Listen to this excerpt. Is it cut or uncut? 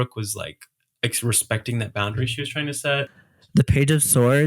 cut